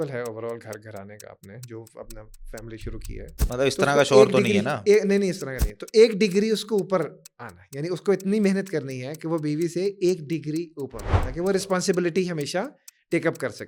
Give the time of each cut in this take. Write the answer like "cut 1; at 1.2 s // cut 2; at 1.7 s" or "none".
none